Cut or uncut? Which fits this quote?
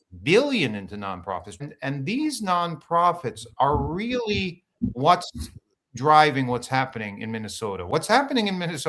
cut